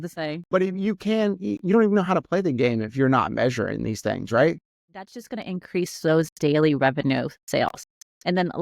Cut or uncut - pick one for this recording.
cut